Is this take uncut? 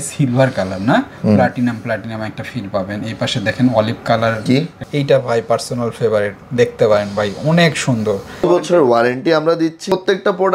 no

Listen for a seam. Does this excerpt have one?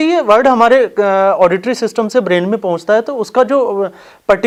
no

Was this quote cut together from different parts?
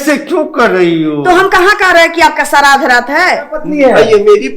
yes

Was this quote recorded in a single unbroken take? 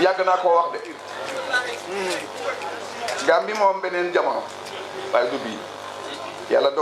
no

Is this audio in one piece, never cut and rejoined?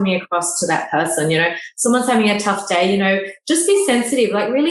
yes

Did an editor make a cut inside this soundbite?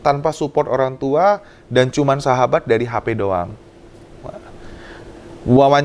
no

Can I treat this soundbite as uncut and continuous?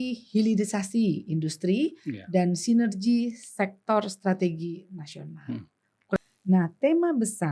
no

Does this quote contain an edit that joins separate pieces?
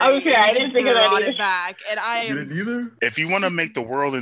yes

